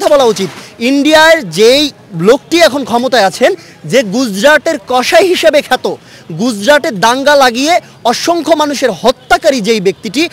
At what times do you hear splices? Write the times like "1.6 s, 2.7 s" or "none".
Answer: none

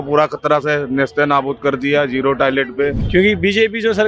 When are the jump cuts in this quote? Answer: 3.0 s

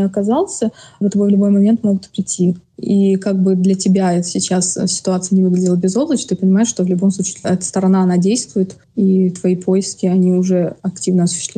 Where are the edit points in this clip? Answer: none

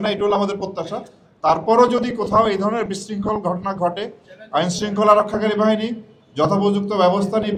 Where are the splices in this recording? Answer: none

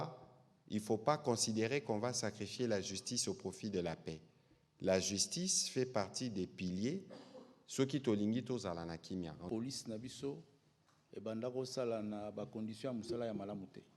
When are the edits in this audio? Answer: 9.4 s

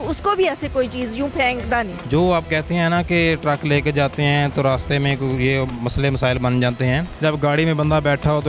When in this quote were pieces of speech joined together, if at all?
2.0 s, 7.1 s

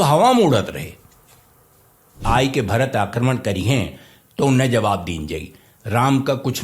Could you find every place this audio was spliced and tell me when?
2.1 s

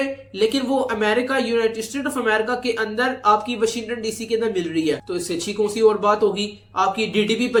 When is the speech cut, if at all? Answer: none

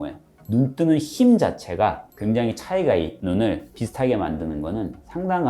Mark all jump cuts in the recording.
3.2 s

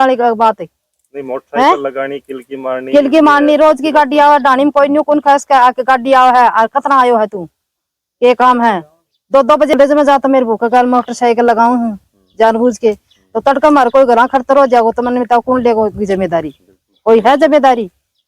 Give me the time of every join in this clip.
9.7 s

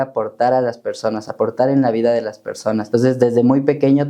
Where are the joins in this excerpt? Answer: 2.8 s

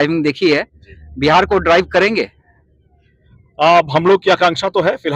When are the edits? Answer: none

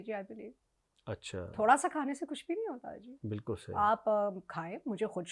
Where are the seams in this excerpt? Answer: none

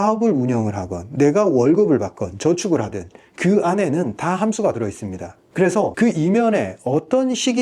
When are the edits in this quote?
5.9 s

